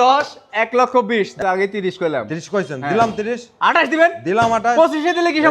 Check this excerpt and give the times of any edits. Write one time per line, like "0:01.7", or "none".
0:01.3